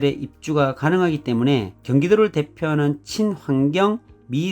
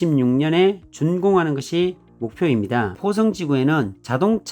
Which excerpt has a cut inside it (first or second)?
second